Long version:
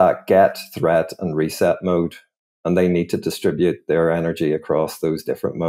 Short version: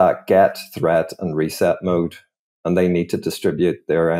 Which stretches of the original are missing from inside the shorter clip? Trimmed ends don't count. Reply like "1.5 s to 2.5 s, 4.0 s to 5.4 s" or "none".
none

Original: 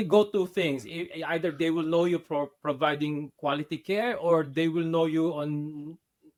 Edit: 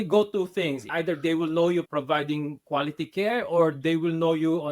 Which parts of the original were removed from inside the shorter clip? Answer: 0.8 s to 1.2 s, 2.2 s to 2.6 s

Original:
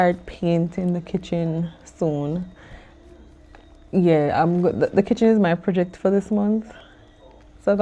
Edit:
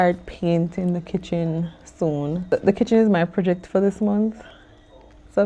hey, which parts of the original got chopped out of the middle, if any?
2.5 s to 4.8 s

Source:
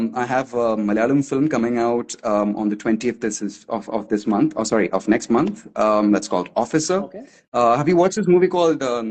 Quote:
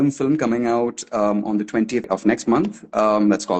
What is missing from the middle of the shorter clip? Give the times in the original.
3.2 s to 4.9 s

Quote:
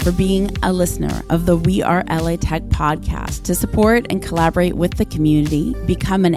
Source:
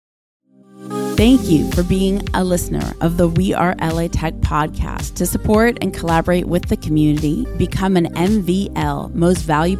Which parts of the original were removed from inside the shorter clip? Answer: none

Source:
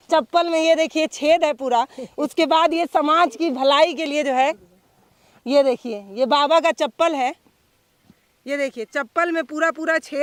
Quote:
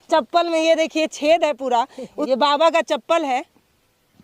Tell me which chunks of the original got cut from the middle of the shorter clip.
2.2 s to 6.1 s

